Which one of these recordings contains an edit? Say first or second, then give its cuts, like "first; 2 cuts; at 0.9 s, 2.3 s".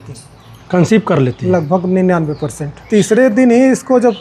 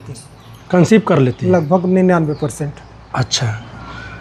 first; 1 cut; at 2.7 s